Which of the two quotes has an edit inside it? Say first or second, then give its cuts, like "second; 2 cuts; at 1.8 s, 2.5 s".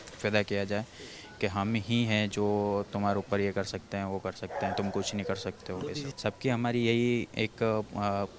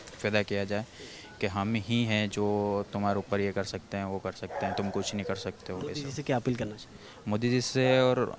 first; 1 cut; at 6.1 s